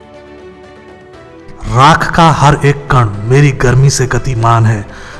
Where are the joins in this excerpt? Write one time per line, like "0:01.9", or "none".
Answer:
0:01.1